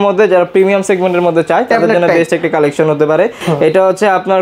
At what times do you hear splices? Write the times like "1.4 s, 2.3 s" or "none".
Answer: none